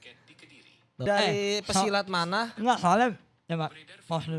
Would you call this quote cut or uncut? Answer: cut